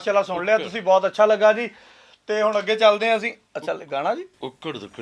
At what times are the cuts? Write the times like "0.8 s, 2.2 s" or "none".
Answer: none